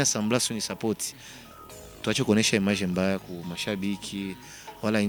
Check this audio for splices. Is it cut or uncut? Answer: uncut